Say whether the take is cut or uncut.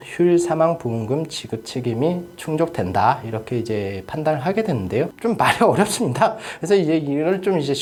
uncut